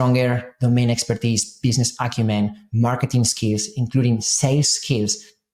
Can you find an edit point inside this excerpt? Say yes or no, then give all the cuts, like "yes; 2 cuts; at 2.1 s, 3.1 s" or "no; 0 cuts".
no; 0 cuts